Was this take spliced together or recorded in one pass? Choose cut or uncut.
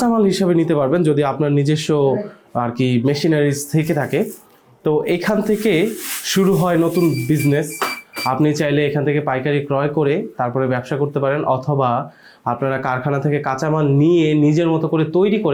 uncut